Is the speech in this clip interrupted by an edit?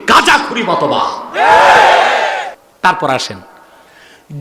yes; 1 cut; at 2.6 s

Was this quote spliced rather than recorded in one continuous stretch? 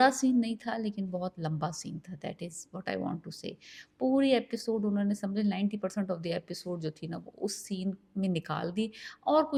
no; 0 cuts

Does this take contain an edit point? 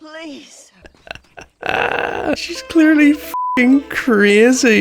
yes; 2 cuts; at 1.0 s, 2.3 s

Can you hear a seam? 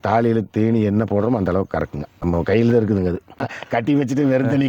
yes; 2 cuts; at 2.0 s, 3.5 s

